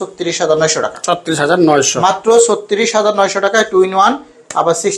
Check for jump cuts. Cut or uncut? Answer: uncut